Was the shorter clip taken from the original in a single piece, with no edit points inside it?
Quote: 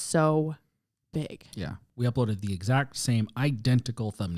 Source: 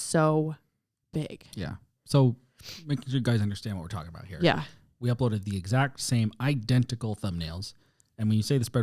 no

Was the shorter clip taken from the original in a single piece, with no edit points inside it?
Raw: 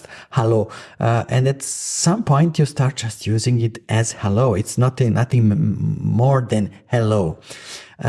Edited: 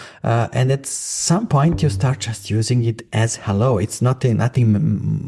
yes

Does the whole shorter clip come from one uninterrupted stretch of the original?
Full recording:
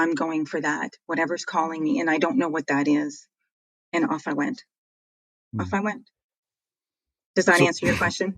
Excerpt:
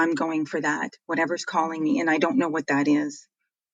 yes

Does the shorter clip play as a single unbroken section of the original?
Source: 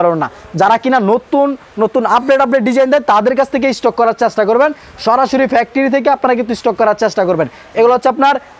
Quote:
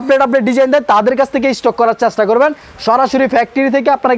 yes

